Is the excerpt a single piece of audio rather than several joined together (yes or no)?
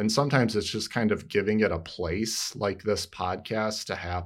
yes